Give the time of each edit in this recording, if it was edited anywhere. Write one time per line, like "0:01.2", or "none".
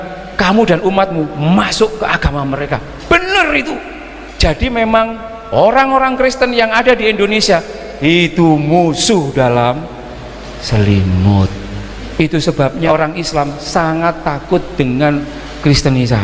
0:12.9